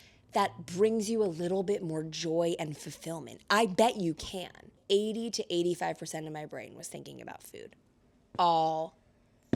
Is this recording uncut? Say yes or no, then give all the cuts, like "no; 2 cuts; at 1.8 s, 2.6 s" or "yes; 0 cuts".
no; 1 cut; at 4.8 s